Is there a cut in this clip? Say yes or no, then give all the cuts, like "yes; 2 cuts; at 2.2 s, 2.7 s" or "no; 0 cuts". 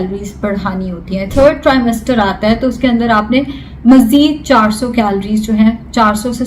yes; 1 cut; at 1.3 s